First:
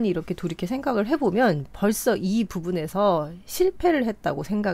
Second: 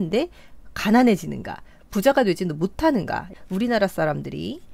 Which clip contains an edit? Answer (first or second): second